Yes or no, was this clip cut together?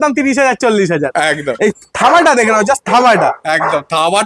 no